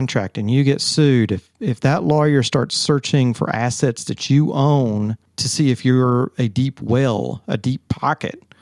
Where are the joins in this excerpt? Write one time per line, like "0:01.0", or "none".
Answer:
none

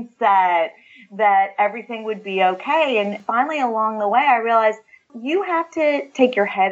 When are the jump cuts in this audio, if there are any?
0:05.1

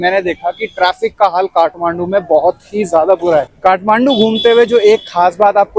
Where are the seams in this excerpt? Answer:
0:03.5

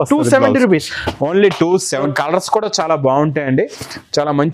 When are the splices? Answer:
0:02.1

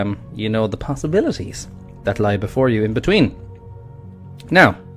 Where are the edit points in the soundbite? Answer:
0:01.4

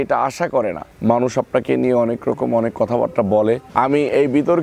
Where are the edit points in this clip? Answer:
0:00.9
0:03.7

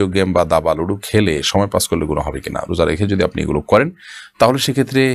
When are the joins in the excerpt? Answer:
none

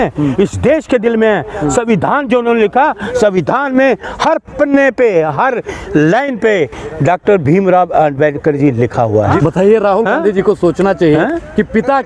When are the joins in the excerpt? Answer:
0:09.4

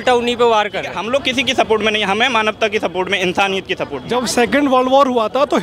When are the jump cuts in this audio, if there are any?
0:00.9
0:04.0

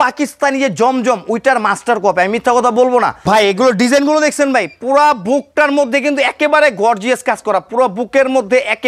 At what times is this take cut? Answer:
0:03.2

